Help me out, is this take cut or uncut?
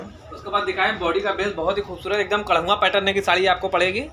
uncut